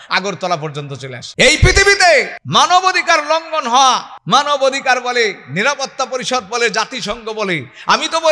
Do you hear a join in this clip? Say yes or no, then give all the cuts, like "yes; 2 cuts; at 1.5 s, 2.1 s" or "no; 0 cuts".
yes; 3 cuts; at 1.2 s, 2.4 s, 4.1 s